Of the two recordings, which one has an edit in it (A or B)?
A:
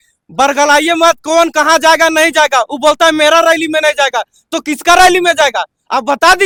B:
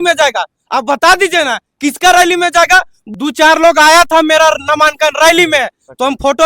B